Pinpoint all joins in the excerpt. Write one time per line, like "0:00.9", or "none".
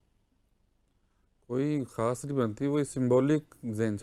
none

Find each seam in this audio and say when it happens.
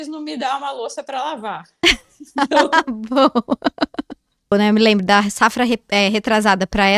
0:04.5

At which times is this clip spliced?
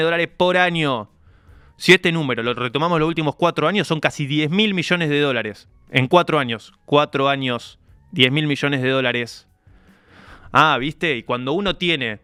none

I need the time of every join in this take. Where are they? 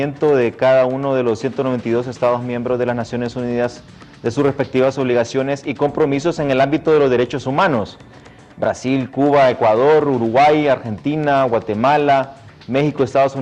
0:02.6

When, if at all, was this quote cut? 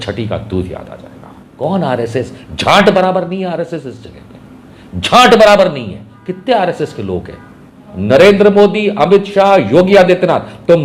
0:01.4
0:07.9

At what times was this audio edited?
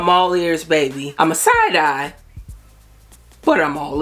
0:01.0

